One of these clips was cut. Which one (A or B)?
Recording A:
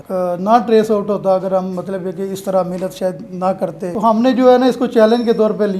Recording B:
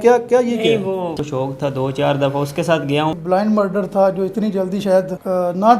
B